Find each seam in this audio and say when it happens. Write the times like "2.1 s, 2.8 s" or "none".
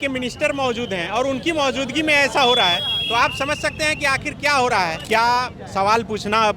5.0 s

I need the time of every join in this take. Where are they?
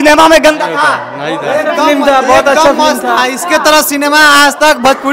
none

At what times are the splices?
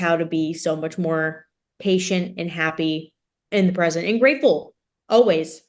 none

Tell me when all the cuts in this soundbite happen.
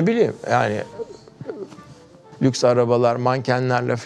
2.3 s

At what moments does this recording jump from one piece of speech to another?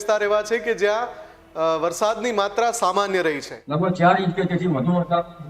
3.5 s

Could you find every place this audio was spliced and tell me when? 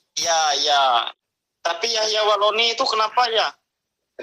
1.1 s

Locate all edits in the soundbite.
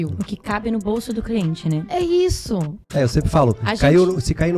2.8 s

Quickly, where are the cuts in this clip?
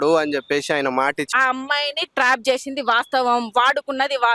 1.2 s

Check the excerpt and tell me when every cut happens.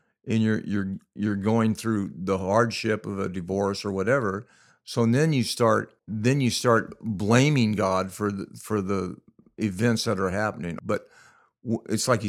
6.0 s, 10.7 s

